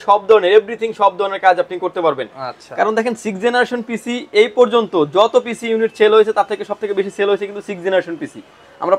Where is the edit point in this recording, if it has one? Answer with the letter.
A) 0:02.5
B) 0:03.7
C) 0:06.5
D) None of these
D